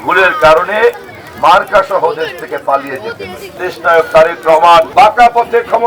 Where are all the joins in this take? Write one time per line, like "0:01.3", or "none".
0:03.7
0:04.9